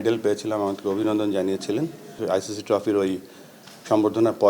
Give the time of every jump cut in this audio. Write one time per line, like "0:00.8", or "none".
0:02.2